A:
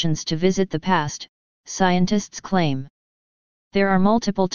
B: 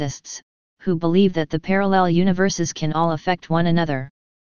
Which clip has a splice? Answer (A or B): A